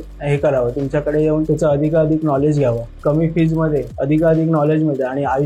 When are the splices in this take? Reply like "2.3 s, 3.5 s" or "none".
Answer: 1.4 s, 2.9 s, 3.9 s

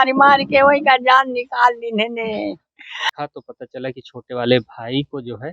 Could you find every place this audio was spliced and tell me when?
3.0 s

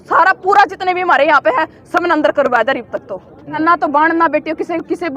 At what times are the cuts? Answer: 3.6 s

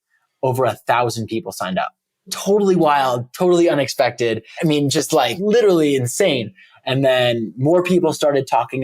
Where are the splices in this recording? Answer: 2.3 s, 4.5 s, 5.4 s, 6.6 s

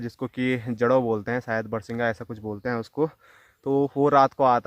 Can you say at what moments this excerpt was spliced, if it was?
none

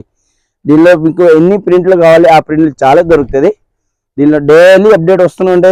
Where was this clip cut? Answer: none

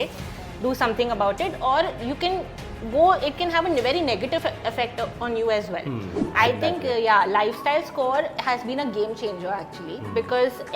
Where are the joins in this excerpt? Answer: 6.2 s

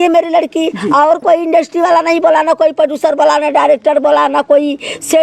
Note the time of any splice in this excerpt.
none

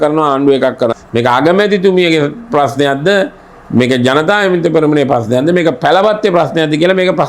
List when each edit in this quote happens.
0.9 s

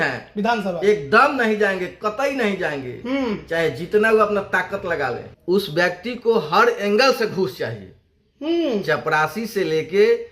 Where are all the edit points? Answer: 5.3 s

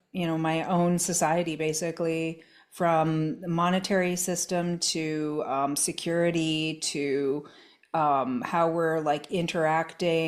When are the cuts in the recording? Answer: none

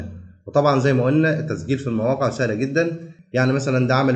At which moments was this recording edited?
3.1 s

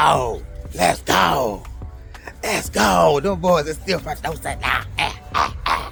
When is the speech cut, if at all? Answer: none

